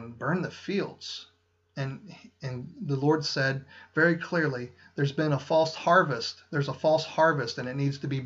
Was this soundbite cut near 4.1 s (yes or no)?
yes